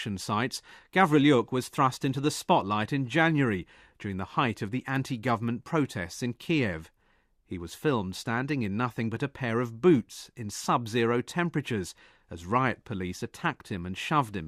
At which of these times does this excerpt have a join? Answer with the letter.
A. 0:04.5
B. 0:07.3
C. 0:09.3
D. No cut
A